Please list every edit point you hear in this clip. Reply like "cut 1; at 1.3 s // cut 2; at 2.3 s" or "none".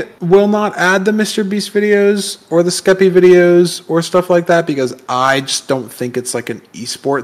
none